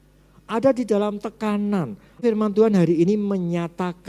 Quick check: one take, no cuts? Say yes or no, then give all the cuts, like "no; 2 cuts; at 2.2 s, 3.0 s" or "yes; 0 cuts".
no; 1 cut; at 2.2 s